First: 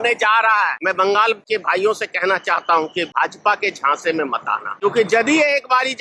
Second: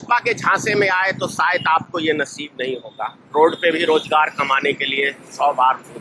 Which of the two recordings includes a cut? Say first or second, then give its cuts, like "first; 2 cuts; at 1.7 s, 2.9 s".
first; 4 cuts; at 0.8 s, 1.4 s, 3.1 s, 4.8 s